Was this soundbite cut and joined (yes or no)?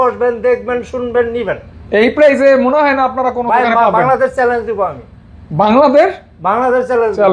no